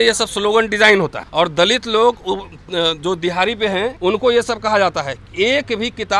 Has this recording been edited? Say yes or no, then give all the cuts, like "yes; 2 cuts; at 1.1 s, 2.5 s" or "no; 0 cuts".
yes; 2 cuts; at 1.2 s, 4.0 s